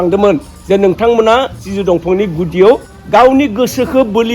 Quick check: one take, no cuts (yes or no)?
no